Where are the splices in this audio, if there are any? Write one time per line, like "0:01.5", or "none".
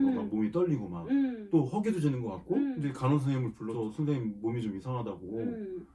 0:01.4
0:02.8
0:03.6